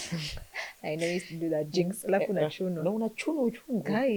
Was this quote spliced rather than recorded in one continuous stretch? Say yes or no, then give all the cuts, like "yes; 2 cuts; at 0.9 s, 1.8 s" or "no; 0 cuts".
no; 0 cuts